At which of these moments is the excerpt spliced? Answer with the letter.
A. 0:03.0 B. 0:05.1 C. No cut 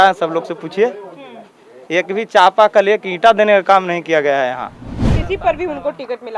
B